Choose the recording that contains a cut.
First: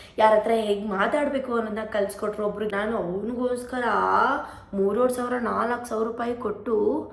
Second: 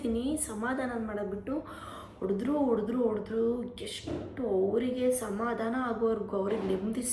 first; 1 cut; at 2.7 s

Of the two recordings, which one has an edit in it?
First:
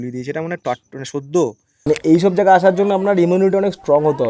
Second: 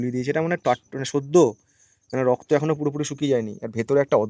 first; 1 cut; at 1.8 s

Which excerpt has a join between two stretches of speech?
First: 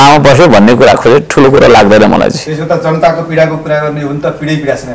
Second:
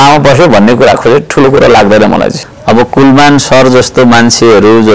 second; 1 cut; at 2.5 s

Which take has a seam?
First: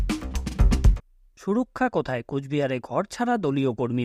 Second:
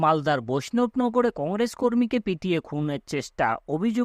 first; 1 cut; at 1.3 s

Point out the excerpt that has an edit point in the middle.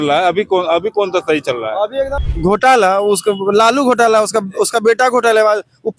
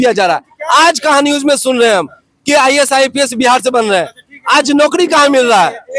first; 1 cut; at 2.2 s

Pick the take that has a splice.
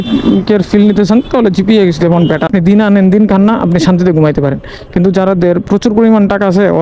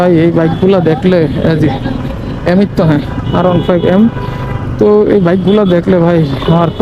first; 1 cut; at 2.5 s

